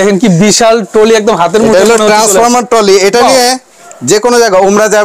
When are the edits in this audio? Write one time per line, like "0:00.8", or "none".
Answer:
none